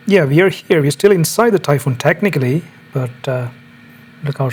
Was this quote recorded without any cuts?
yes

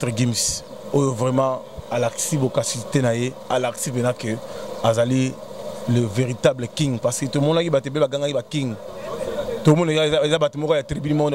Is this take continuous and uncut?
yes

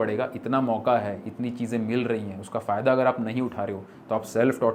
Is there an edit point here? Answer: no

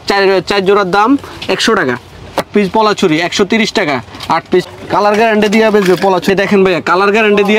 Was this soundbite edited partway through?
yes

